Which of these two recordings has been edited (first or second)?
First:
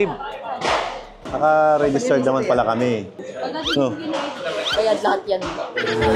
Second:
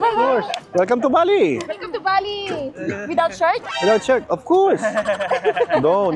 first